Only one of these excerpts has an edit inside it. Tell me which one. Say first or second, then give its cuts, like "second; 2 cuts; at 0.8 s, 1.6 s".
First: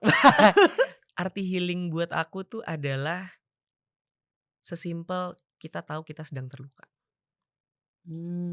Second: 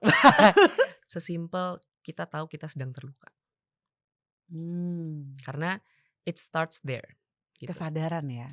second; 1 cut; at 1.0 s